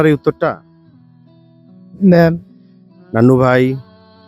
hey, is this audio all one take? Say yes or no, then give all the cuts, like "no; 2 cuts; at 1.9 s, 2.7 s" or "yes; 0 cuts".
yes; 0 cuts